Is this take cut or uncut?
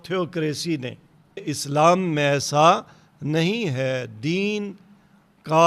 cut